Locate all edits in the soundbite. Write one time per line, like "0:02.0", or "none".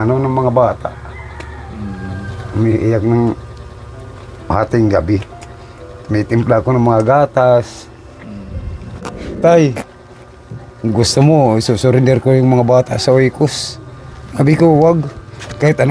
0:09.1